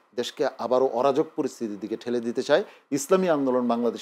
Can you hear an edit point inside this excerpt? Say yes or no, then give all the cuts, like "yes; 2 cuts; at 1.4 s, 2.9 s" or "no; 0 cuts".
no; 0 cuts